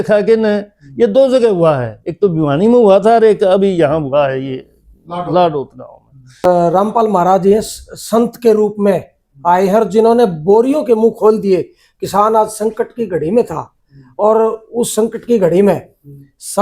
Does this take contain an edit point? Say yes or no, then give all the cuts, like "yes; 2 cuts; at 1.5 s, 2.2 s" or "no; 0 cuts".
yes; 1 cut; at 6.4 s